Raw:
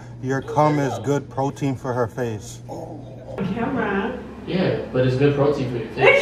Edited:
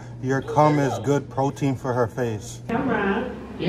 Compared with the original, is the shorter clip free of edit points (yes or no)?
no